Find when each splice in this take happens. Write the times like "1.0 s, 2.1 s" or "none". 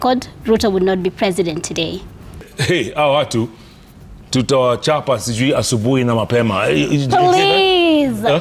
2.5 s